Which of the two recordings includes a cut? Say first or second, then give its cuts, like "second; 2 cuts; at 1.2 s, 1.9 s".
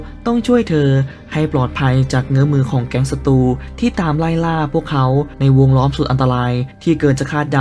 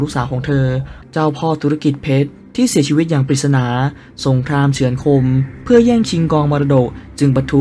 second; 1 cut; at 1.0 s